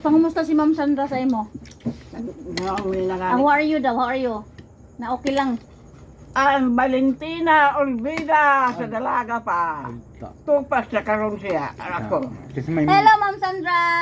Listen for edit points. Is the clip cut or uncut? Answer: uncut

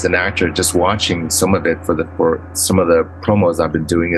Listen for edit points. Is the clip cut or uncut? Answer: cut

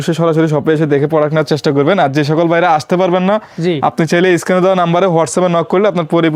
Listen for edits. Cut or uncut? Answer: uncut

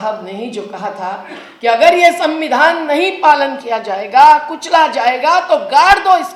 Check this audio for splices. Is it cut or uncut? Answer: uncut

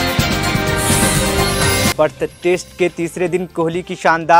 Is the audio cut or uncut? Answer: cut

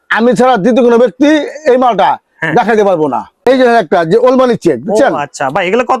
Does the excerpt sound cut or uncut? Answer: cut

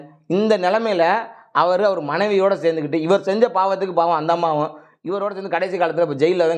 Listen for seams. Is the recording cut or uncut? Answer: uncut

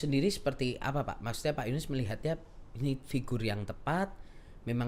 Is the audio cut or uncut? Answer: uncut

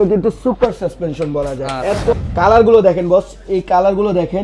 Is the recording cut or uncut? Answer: cut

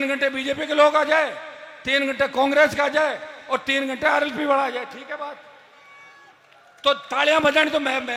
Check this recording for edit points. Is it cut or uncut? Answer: uncut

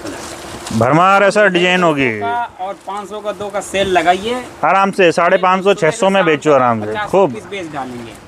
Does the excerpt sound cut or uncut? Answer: uncut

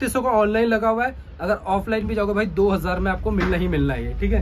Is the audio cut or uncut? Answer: uncut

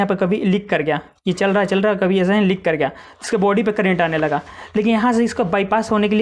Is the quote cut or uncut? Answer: uncut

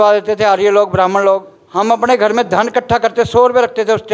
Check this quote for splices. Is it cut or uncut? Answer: cut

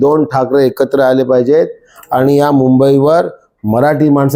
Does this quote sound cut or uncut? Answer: uncut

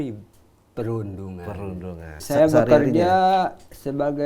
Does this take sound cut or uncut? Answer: cut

